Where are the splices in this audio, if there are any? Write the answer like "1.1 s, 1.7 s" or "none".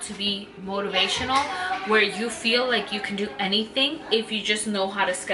none